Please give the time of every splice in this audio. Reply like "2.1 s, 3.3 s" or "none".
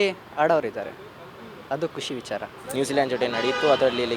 2.6 s